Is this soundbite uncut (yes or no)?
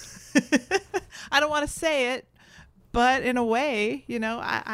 yes